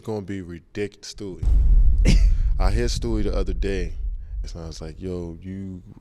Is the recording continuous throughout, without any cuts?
no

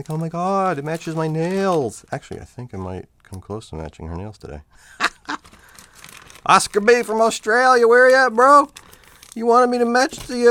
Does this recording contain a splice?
no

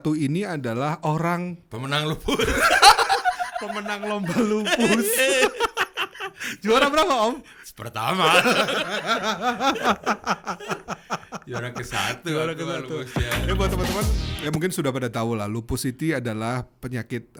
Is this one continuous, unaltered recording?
yes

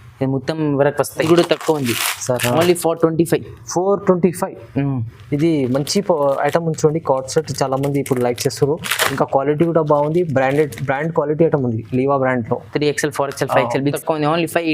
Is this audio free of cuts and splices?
no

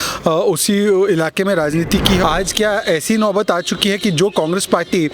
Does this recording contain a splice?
yes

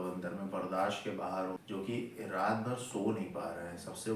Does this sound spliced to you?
yes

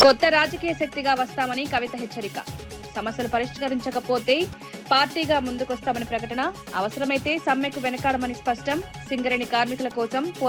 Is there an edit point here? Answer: no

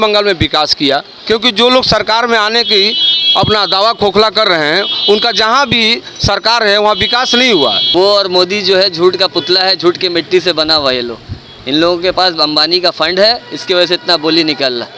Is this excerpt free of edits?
no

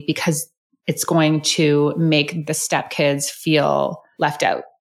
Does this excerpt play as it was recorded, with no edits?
no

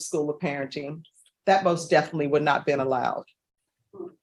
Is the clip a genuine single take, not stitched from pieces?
yes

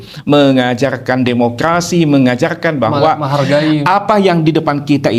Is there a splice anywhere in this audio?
no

